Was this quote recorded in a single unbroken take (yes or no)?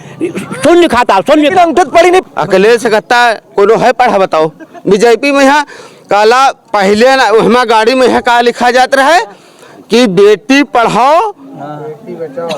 no